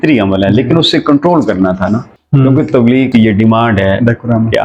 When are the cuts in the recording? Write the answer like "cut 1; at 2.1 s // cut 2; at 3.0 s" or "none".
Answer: cut 1; at 2.1 s // cut 2; at 3.1 s